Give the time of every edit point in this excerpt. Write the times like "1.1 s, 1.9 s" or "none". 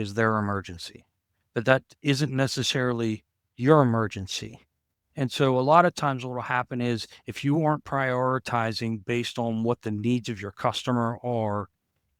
none